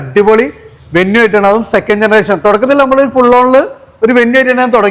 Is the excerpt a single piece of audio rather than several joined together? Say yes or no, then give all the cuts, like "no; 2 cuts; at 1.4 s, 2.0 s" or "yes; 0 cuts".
yes; 0 cuts